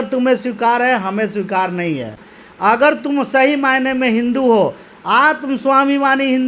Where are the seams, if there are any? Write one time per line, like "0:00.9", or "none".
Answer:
none